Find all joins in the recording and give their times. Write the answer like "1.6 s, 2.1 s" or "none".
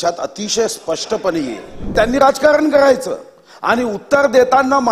1.9 s